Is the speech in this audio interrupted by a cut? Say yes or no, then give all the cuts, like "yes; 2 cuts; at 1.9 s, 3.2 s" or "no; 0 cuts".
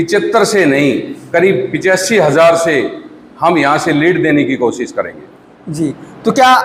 no; 0 cuts